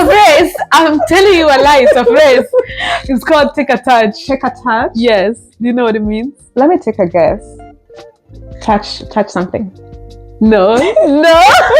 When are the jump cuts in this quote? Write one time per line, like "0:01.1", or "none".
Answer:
none